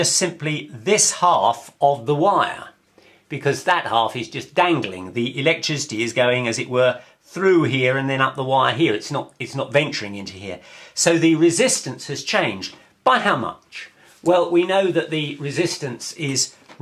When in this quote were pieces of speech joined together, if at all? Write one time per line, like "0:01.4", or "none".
none